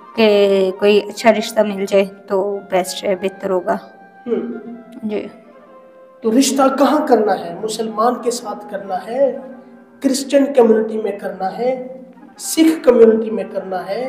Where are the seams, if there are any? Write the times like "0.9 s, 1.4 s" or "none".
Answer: none